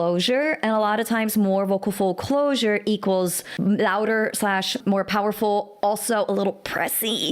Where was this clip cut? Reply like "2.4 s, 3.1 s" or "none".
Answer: 3.4 s, 4.8 s

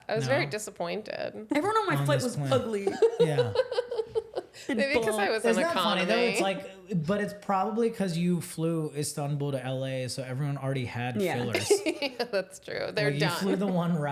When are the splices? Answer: 1.4 s

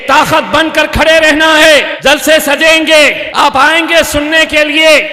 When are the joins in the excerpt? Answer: 1.9 s, 3.2 s

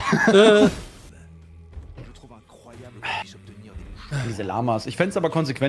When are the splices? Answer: 1.1 s

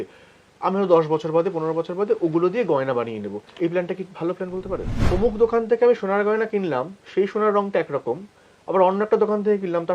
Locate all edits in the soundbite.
5.0 s

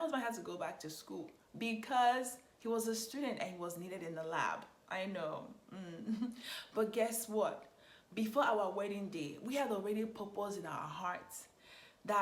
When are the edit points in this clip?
none

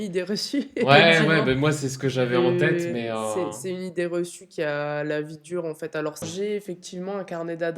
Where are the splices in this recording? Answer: 6.2 s

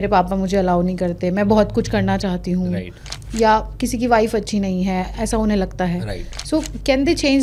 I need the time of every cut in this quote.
none

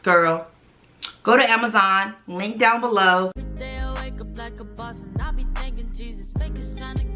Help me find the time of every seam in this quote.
3.5 s

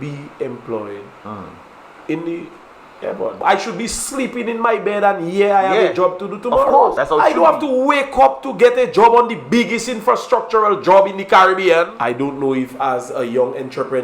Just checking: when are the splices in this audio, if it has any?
3.4 s, 7.0 s, 11.9 s

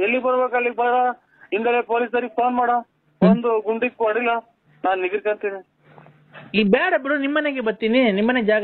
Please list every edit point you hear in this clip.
4.6 s

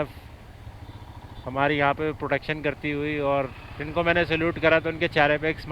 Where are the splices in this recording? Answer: none

